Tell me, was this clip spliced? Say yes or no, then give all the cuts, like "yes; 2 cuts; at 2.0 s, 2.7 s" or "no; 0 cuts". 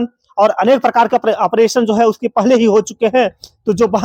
no; 0 cuts